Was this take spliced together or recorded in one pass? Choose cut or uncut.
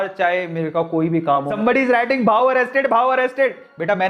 cut